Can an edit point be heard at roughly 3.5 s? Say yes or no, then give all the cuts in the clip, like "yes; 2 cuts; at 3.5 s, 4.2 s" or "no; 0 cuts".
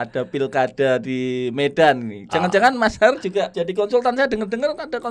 yes; 1 cut; at 3.5 s